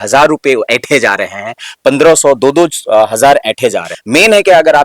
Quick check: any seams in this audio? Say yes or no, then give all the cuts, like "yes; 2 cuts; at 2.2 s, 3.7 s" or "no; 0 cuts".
yes; 1 cut; at 3.9 s